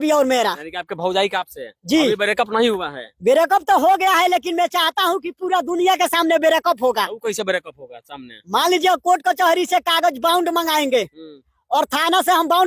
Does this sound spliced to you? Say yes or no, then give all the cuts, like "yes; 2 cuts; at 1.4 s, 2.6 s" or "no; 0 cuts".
no; 0 cuts